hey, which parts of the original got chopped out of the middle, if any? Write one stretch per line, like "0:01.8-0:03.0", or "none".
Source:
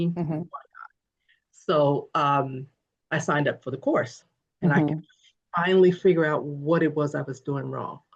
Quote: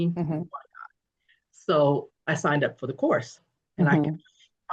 0:02.1-0:02.9